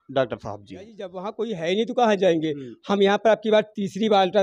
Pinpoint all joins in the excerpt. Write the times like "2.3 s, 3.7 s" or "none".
1.2 s